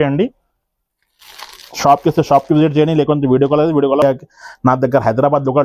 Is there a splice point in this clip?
yes; 1 cut; at 4.0 s

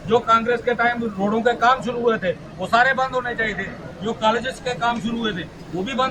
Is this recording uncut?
yes; 0 cuts

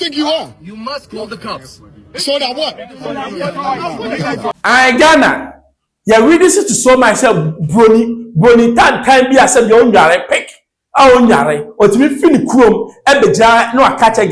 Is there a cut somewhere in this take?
yes; 1 cut; at 4.5 s

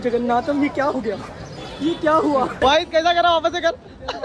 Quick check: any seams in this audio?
yes; 1 cut; at 2.7 s

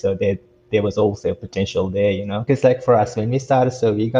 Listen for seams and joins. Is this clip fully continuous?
no; 1 cut; at 2.4 s

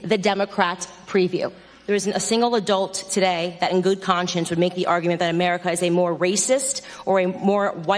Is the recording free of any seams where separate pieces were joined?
no; 1 cut; at 1.7 s

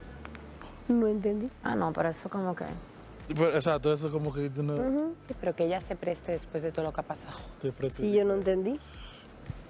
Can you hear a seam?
no; 0 cuts

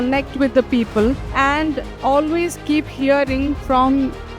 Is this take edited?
yes; 1 cut; at 1.2 s

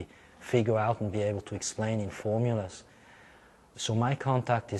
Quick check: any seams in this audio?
no; 0 cuts

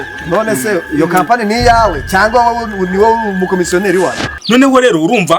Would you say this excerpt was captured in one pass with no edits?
no; 1 cut; at 4.3 s

